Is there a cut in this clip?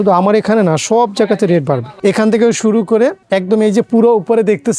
yes; 1 cut; at 1.9 s

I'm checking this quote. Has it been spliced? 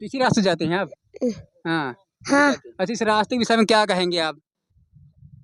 no; 0 cuts

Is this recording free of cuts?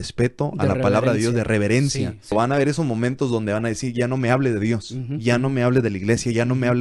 no; 1 cut; at 2.3 s

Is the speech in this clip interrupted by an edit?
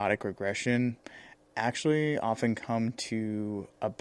no; 0 cuts

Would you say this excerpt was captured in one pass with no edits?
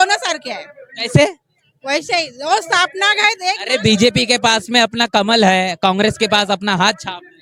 yes; 0 cuts

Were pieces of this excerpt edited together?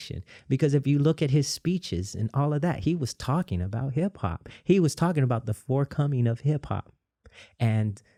no; 0 cuts

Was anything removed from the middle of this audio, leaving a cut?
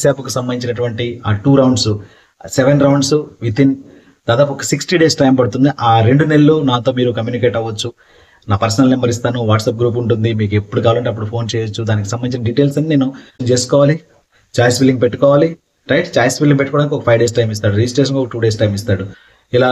yes; 1 cut; at 13.4 s

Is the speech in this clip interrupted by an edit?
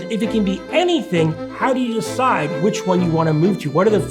yes; 1 cut; at 1.4 s

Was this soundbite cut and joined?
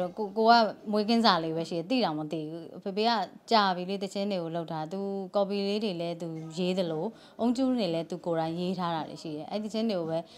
no; 0 cuts

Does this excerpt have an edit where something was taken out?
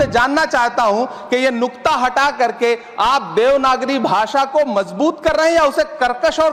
no; 0 cuts

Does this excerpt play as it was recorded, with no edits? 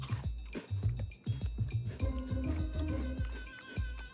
yes; 0 cuts

